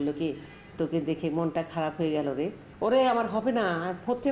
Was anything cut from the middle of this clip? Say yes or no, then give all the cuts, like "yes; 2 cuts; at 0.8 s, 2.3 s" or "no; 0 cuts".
yes; 1 cut; at 2.6 s